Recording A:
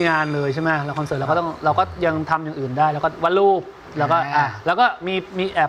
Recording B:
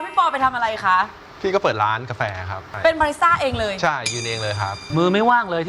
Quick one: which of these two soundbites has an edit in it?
B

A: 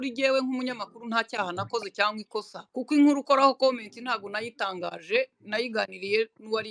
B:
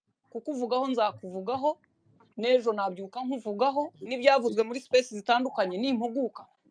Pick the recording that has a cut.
A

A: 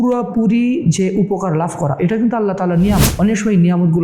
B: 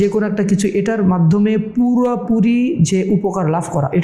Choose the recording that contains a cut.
A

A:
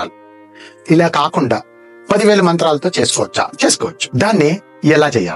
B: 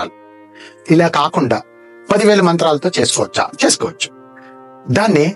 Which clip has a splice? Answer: A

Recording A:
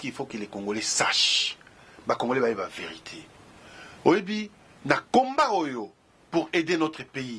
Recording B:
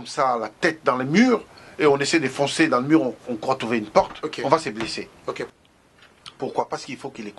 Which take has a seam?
B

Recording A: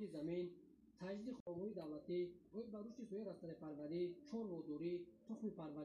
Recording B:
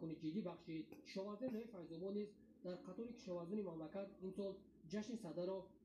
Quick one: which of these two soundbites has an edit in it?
A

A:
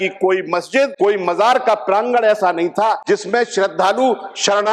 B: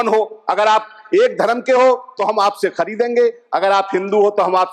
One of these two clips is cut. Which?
A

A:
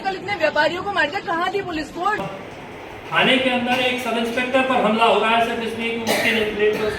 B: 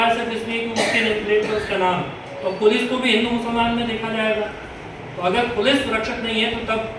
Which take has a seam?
A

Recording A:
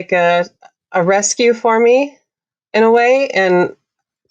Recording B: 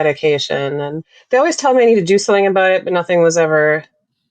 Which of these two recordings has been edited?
B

